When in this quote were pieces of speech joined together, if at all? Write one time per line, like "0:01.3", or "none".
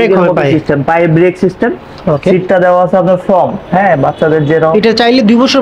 0:04.7